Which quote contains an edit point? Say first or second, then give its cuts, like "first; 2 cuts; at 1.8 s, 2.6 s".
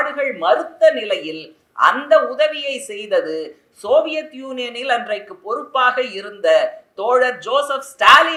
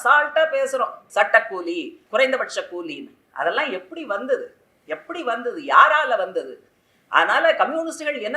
second; 2 cuts; at 1.0 s, 2.0 s